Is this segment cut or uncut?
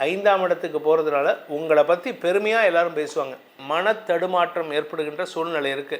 cut